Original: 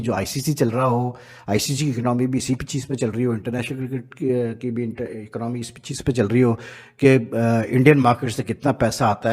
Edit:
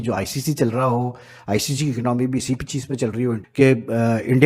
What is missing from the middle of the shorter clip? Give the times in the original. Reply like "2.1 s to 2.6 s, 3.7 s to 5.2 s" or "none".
3.4 s to 6.9 s